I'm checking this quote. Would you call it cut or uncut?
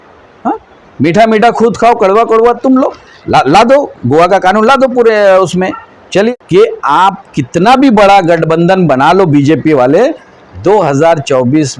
cut